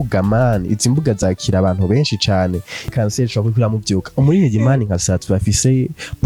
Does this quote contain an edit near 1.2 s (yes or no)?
no